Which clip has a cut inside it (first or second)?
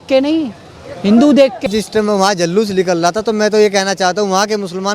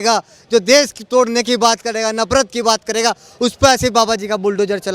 first